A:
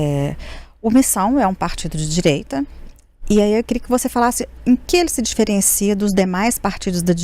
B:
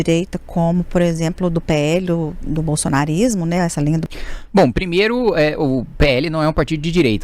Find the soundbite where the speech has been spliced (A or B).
B